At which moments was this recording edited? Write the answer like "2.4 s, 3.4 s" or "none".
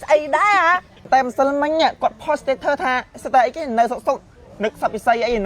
1.0 s